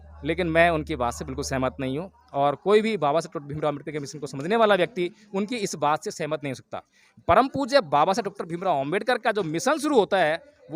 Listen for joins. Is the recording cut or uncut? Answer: uncut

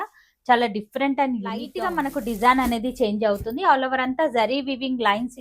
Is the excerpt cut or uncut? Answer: cut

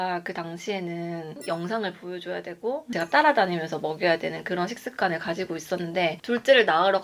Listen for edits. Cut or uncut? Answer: cut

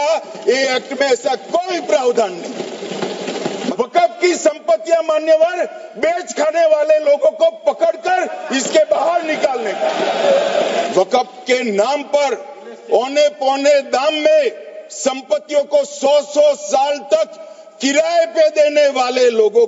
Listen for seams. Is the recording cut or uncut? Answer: cut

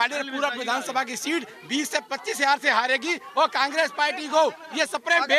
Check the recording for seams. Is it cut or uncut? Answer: uncut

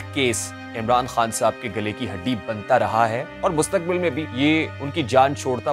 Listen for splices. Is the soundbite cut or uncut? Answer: cut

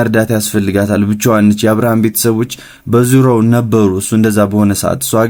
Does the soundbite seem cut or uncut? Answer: uncut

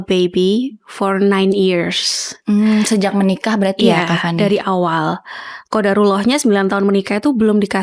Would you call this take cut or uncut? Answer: uncut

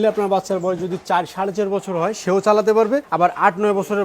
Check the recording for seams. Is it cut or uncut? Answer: cut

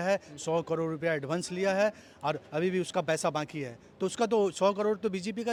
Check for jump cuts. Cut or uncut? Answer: uncut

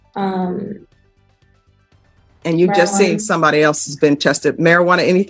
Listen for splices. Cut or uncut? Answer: uncut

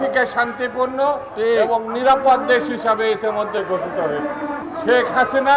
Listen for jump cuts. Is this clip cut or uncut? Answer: cut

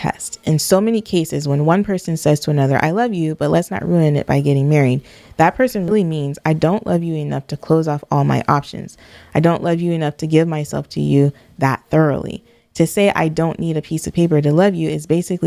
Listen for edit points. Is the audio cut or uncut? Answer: uncut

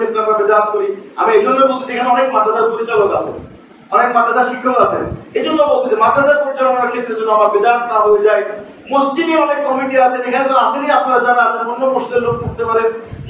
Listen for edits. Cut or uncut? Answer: uncut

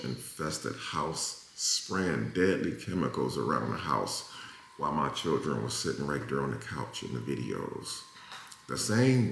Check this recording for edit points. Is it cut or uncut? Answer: uncut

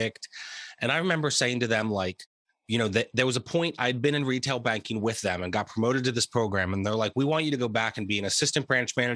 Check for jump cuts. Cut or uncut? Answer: uncut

